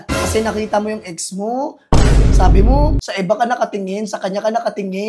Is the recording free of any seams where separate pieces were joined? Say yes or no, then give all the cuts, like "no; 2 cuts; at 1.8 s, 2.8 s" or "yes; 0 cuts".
no; 1 cut; at 3.0 s